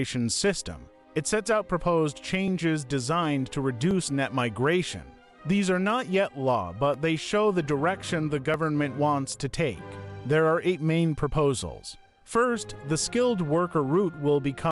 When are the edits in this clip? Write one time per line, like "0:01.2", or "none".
none